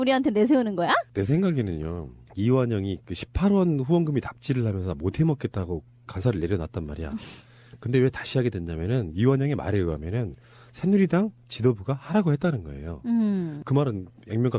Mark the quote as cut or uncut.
cut